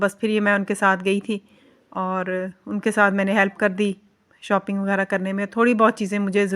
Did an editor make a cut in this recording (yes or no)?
no